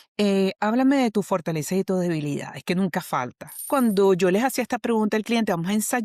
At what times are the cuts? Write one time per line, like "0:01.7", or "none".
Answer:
0:03.6